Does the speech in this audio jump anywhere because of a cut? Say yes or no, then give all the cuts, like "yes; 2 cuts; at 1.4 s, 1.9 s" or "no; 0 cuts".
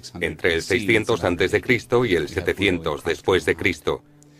yes; 1 cut; at 3.4 s